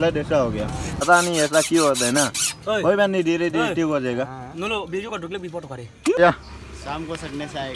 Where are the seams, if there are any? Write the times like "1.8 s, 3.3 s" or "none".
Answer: 1.0 s, 6.2 s